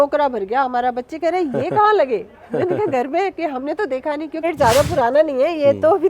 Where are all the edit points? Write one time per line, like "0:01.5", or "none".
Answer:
0:04.4